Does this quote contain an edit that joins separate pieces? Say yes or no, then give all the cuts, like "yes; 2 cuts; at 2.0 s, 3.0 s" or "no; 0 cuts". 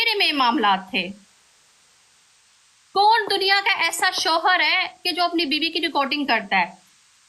no; 0 cuts